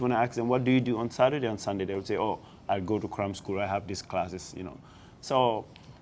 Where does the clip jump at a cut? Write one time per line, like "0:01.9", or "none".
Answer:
none